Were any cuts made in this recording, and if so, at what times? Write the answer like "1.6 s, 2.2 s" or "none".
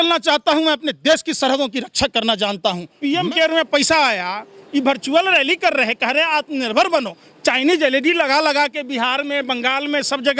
2.9 s